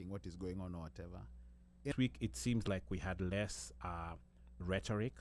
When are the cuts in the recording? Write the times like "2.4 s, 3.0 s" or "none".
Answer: 1.9 s